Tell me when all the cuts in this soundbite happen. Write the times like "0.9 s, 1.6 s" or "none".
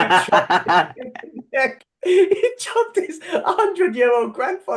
none